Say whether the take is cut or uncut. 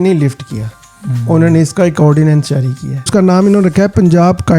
cut